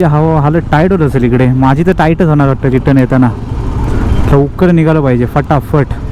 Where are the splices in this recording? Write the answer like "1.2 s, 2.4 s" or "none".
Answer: none